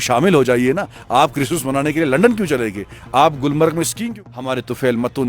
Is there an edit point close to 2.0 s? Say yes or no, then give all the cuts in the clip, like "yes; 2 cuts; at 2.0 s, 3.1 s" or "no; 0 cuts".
no; 1 cut; at 4.0 s